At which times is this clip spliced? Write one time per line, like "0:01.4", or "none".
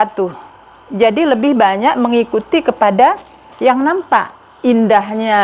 none